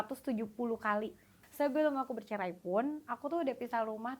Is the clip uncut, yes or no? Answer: no